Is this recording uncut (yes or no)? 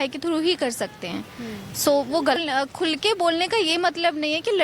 no